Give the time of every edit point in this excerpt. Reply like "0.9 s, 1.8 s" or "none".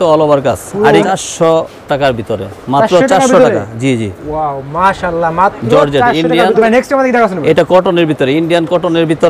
1.1 s, 6.6 s